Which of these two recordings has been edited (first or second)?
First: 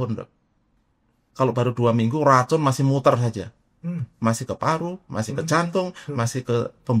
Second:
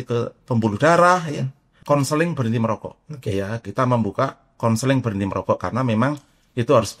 second